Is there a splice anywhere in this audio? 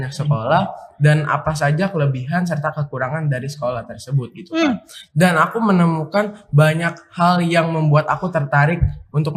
no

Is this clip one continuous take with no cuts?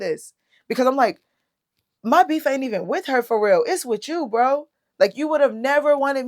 yes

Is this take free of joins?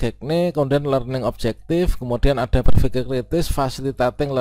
yes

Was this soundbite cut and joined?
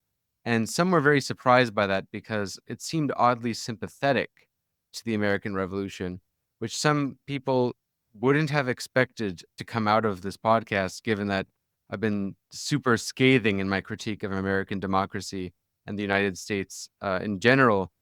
yes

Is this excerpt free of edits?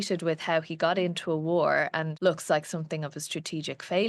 no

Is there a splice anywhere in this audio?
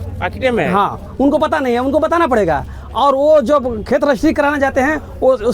no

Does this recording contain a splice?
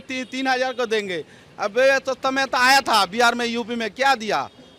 no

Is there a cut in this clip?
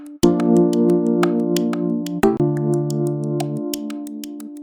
yes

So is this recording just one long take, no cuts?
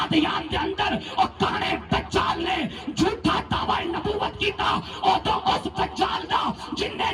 yes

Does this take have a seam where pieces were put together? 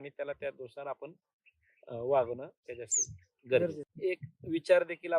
yes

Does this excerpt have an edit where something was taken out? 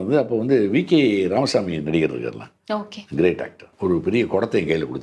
yes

